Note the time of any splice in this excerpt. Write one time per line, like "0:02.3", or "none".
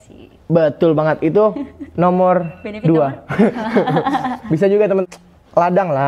0:05.0